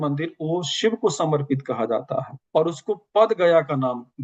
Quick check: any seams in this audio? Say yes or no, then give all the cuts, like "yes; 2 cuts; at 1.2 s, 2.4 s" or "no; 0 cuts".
no; 0 cuts